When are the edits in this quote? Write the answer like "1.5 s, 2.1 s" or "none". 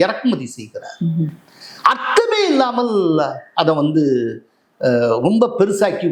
none